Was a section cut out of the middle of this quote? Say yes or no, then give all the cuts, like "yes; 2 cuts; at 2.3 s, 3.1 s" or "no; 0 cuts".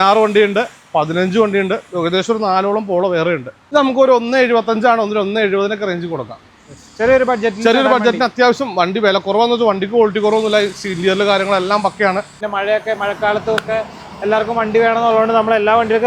yes; 2 cuts; at 3.5 s, 12.4 s